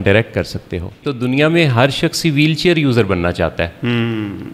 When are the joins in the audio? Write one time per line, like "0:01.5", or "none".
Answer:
0:01.1